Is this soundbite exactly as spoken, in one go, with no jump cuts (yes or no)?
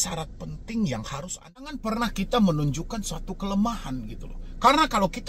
no